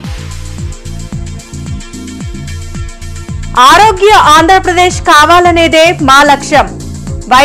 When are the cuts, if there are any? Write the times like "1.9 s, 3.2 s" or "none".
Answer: 2.7 s